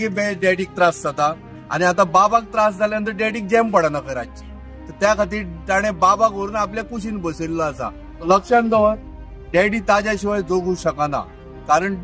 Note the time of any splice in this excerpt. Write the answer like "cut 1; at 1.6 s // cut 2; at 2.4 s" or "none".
cut 1; at 8.1 s